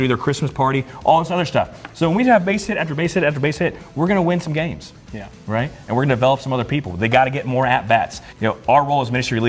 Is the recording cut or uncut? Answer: cut